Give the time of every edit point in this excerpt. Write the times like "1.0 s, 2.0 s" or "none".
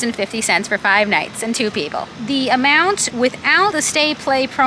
2.1 s, 3.5 s

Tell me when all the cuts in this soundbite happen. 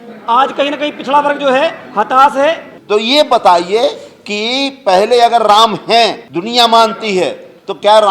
2.7 s, 6.3 s

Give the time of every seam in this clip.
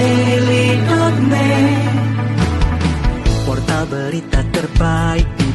none

